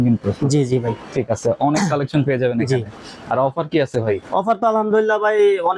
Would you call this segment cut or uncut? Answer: uncut